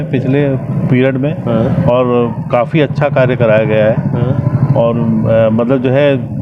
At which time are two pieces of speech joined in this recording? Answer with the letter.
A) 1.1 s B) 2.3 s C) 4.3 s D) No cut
D